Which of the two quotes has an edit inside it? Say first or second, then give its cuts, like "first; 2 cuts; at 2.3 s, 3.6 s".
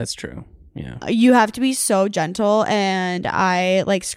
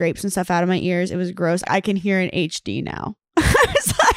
second; 1 cut; at 1.6 s